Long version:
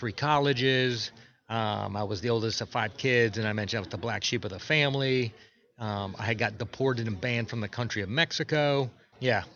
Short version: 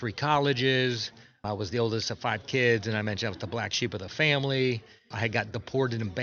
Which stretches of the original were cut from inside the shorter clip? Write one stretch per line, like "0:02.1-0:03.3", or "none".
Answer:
0:01.4-0:01.9
0:05.6-0:06.1